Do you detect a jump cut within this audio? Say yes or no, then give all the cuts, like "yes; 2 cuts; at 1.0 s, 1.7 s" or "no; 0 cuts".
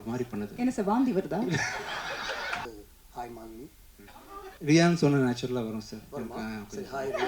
yes; 2 cuts; at 2.7 s, 4.5 s